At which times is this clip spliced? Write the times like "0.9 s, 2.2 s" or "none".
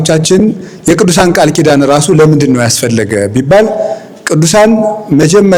none